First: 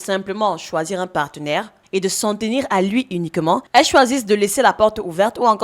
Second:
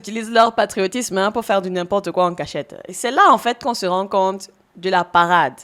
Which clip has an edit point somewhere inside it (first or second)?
first